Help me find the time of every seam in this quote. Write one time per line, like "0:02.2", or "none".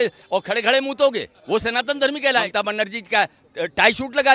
0:01.3
0:02.5